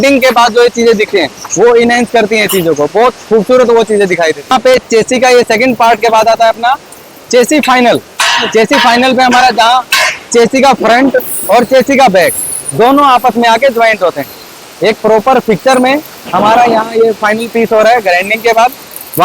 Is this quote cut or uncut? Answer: cut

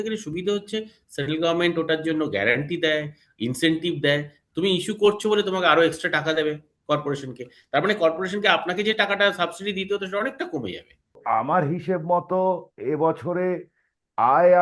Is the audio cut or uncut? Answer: cut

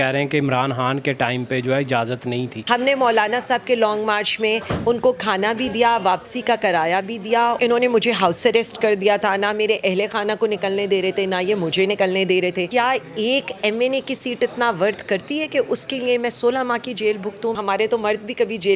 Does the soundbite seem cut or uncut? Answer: cut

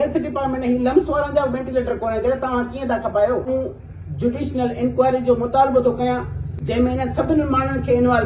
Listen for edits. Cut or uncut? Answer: uncut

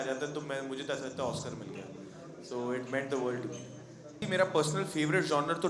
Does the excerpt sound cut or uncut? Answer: uncut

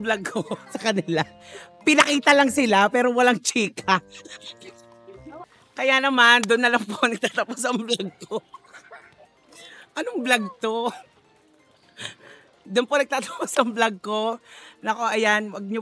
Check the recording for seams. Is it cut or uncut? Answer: uncut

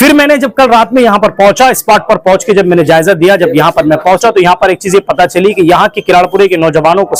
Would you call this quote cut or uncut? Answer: uncut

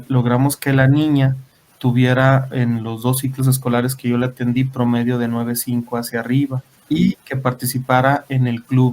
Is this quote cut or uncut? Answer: cut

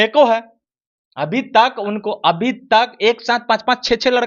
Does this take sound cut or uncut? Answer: uncut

